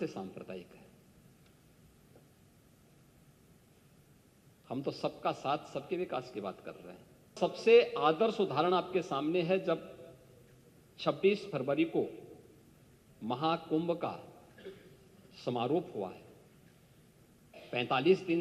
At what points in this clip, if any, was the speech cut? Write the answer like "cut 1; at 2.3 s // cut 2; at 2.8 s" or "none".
cut 1; at 7.3 s